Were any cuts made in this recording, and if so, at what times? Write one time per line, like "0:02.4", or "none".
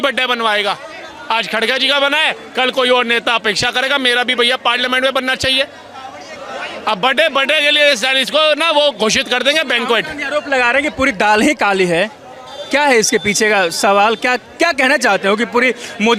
none